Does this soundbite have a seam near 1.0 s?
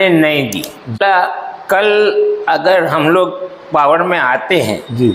yes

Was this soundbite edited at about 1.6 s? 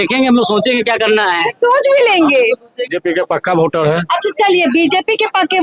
no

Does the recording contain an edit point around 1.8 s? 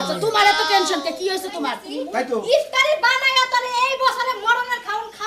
yes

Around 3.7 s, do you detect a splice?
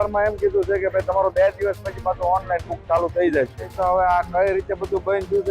yes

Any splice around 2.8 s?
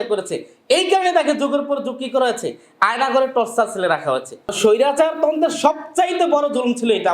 no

